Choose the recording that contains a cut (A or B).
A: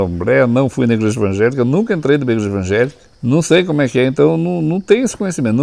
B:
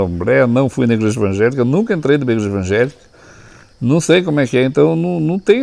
A